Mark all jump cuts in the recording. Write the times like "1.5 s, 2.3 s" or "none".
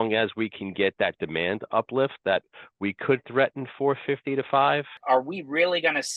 5.0 s

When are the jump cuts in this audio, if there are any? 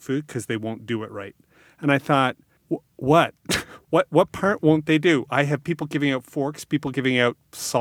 2.5 s

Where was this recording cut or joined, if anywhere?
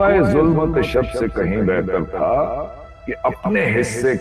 none

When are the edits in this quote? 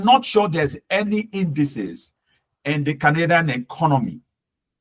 none

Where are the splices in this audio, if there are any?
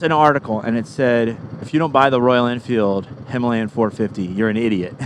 1.7 s

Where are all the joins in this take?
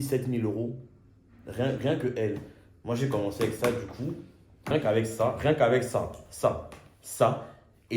4.7 s

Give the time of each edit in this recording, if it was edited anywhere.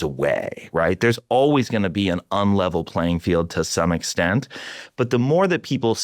none

